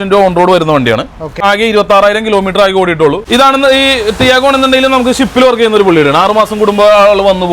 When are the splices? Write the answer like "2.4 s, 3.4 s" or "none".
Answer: 1.4 s, 3.2 s